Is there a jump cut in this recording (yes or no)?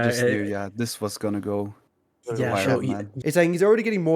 yes